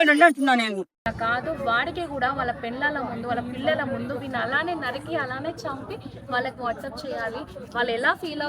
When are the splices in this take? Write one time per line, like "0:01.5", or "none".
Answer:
0:01.1